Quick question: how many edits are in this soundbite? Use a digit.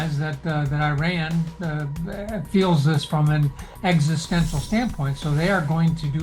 0